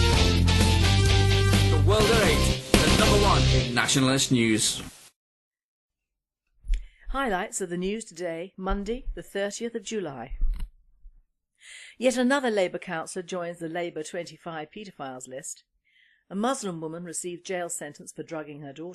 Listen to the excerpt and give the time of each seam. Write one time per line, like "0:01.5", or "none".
0:07.8